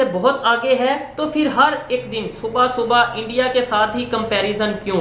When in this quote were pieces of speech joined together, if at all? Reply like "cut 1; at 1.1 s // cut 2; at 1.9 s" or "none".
none

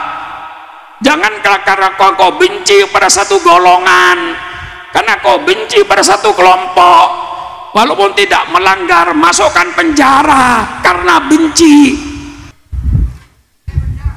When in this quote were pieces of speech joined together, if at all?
cut 1; at 12.6 s

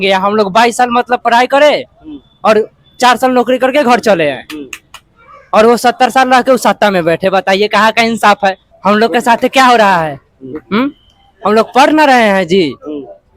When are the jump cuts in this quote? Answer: cut 1; at 8.7 s

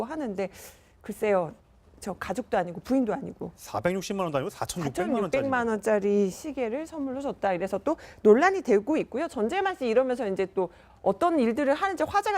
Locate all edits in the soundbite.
cut 1; at 10.8 s

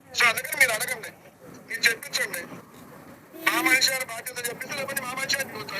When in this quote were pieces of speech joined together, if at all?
cut 1; at 1.8 s

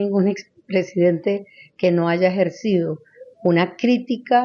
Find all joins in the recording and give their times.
none

